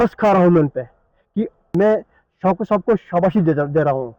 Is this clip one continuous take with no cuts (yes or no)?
no